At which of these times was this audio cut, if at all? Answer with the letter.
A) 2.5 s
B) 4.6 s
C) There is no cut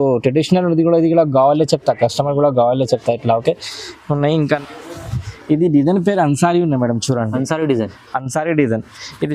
B